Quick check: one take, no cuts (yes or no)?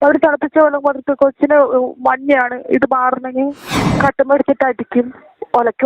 no